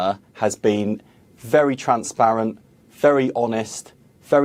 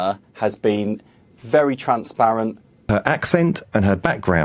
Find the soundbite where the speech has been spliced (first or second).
second